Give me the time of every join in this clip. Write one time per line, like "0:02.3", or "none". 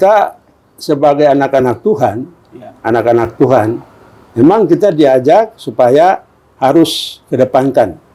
none